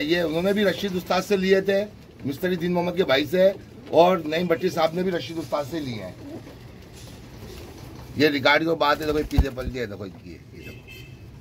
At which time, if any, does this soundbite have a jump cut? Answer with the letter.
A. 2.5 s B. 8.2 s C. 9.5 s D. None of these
D